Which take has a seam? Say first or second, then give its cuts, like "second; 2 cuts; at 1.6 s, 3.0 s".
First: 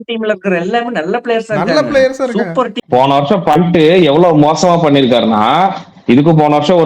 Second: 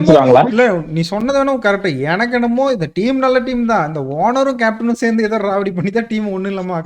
first; 1 cut; at 2.8 s